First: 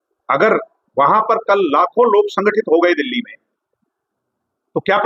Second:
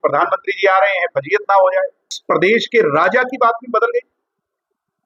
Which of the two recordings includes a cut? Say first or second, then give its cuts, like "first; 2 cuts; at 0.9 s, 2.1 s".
second; 1 cut; at 2.1 s